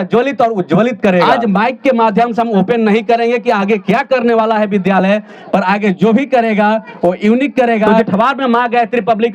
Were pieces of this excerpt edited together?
yes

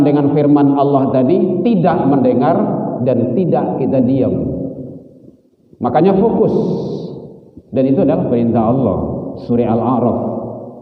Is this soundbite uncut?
yes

